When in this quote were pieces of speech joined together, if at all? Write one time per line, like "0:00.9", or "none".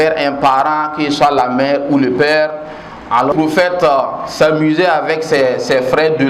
0:03.3